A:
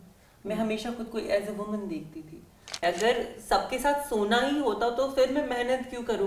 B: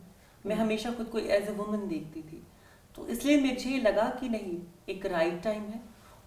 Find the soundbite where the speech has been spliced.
A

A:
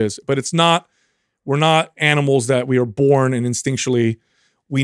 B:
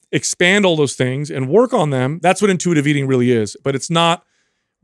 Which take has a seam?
B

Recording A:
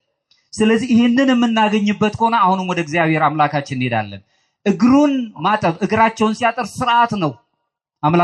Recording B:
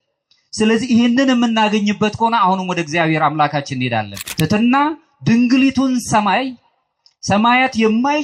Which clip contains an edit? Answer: B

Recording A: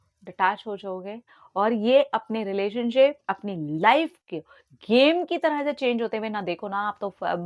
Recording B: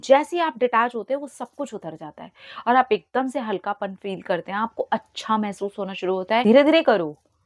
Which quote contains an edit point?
B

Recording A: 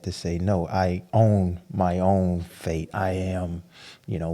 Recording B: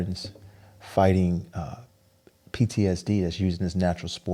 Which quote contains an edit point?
A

